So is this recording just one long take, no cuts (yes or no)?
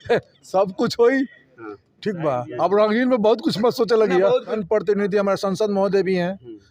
no